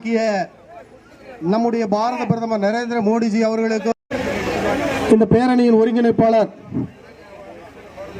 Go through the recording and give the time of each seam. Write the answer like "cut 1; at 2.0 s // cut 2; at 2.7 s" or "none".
cut 1; at 3.9 s